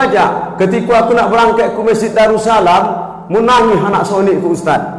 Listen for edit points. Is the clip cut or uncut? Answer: uncut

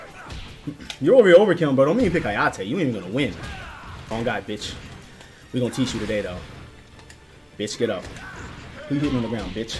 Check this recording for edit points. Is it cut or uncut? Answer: cut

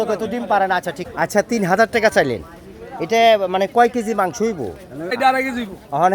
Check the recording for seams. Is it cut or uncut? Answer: cut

